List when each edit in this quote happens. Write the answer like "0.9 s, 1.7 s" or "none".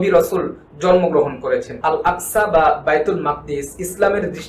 1.7 s

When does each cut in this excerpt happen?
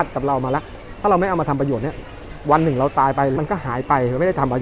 3.4 s

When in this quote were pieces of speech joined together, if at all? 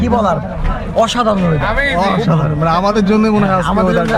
none

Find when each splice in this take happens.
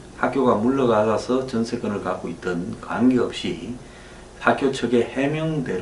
1.7 s

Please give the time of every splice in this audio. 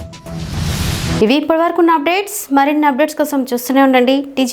none

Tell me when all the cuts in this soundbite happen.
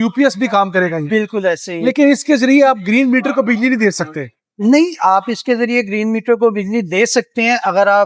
none

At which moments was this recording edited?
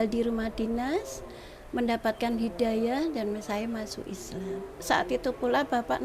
4.8 s

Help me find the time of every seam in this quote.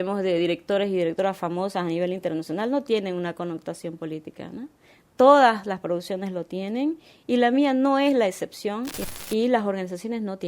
9.0 s

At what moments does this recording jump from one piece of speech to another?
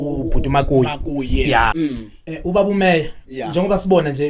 1.7 s

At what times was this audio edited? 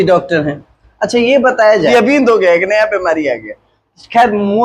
1.9 s

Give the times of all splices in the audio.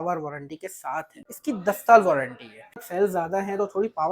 1.3 s, 2.8 s

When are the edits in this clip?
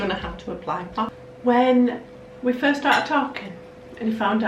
1.2 s

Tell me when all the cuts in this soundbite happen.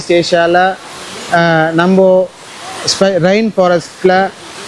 none

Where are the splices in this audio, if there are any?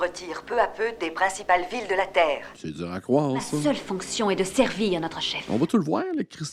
3.6 s, 5.3 s

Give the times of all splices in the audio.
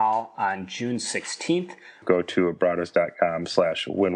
2.0 s

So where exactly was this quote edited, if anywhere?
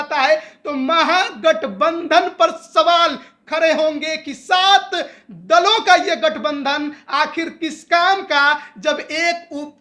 none

